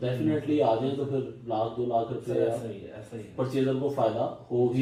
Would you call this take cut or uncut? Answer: uncut